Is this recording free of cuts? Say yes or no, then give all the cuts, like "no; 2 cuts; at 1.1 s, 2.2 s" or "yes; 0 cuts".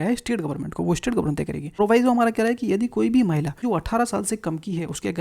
no; 2 cuts; at 1.7 s, 3.5 s